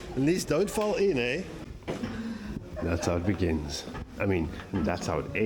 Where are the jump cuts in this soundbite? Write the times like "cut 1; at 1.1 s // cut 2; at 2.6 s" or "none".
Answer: cut 1; at 1.7 s

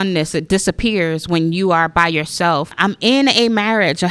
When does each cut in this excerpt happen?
cut 1; at 2.8 s

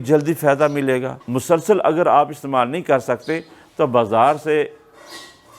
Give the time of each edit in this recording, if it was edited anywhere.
cut 1; at 1.2 s

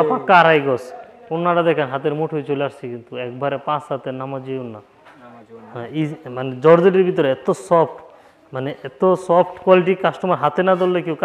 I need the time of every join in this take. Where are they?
none

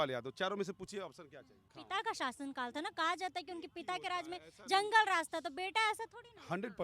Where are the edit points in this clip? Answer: cut 1; at 1.8 s

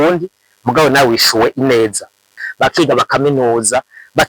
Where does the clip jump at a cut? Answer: cut 1; at 2.4 s

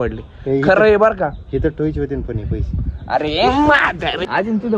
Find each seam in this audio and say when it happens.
cut 1; at 2.7 s // cut 2; at 4.0 s

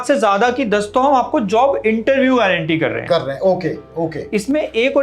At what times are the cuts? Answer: none

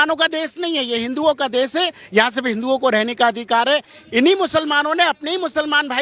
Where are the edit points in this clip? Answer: cut 1; at 3.9 s

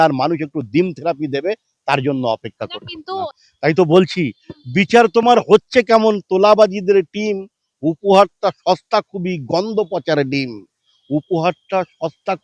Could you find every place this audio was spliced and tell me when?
cut 1; at 3.3 s

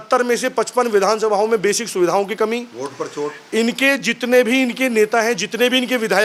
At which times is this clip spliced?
none

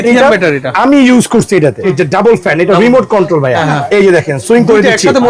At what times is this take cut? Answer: cut 1; at 1.9 s // cut 2; at 3.7 s

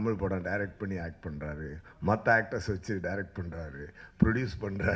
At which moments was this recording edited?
none

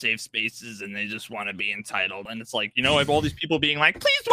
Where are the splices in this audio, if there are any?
cut 1; at 2.3 s

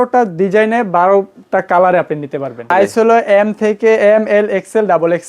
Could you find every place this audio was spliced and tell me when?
cut 1; at 2.7 s

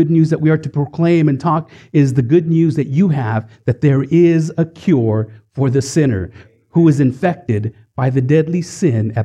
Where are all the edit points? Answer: none

